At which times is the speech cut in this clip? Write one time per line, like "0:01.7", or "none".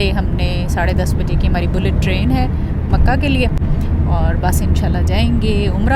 none

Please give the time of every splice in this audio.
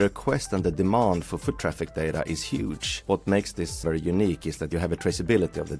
0:03.0
0:03.8

